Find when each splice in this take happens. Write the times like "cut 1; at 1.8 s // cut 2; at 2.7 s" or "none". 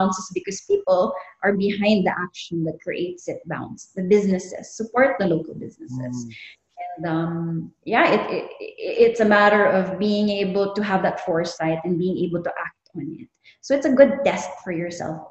none